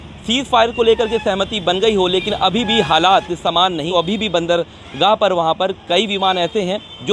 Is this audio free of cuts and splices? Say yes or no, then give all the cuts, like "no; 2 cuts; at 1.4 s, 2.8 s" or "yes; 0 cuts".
no; 1 cut; at 3.9 s